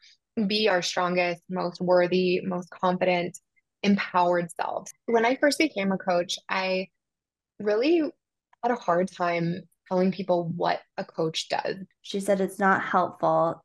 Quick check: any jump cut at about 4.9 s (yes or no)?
yes